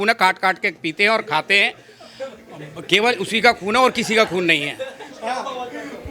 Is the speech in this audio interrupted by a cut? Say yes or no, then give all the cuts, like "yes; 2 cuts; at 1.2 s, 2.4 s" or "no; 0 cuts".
no; 0 cuts